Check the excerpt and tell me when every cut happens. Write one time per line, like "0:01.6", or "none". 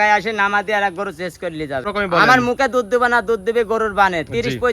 0:01.8